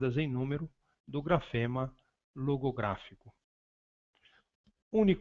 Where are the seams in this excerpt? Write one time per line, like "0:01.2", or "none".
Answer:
0:01.9